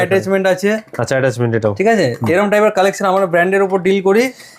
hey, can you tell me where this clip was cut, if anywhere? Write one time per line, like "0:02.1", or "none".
none